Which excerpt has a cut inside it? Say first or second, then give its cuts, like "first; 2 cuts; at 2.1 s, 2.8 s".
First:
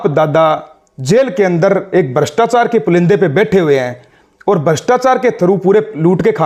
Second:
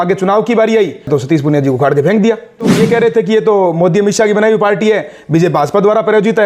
second; 2 cuts; at 1.1 s, 2.7 s